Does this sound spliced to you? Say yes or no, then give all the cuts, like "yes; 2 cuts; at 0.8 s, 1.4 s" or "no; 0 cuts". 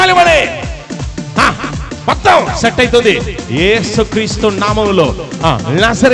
no; 0 cuts